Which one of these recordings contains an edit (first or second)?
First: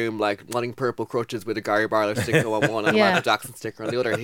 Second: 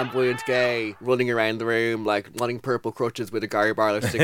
second